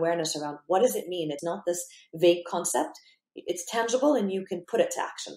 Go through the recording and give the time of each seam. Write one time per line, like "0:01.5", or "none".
0:01.4